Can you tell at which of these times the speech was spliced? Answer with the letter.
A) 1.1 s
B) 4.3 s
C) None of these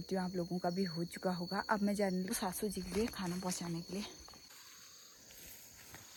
C